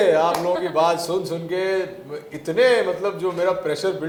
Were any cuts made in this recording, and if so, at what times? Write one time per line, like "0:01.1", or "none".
none